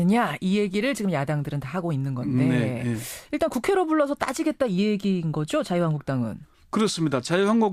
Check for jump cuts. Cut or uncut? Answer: uncut